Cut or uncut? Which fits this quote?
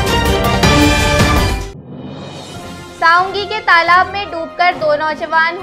cut